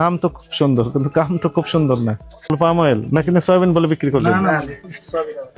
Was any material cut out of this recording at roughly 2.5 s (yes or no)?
yes